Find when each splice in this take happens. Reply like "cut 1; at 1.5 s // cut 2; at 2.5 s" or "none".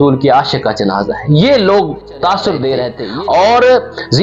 cut 1; at 3.0 s